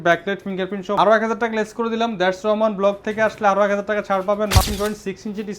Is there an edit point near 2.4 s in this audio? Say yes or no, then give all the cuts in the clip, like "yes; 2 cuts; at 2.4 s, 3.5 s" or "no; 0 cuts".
no; 2 cuts; at 1.0 s, 4.6 s